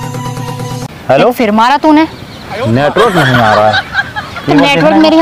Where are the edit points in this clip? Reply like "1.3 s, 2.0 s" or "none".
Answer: 0.9 s

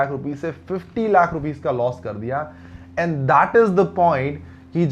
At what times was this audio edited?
none

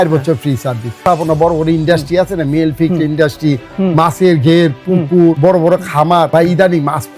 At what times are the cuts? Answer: 1.0 s, 5.4 s, 6.3 s

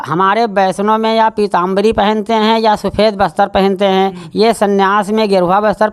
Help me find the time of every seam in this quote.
none

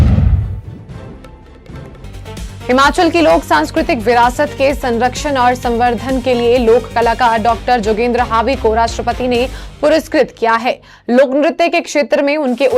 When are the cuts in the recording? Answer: 2.0 s

